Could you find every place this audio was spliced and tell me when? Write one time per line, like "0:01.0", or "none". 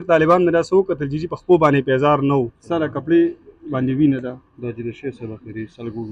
0:02.6